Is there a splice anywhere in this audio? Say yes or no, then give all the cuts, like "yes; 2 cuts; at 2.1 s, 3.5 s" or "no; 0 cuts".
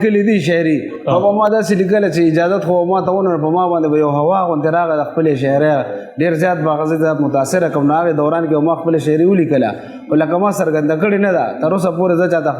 no; 0 cuts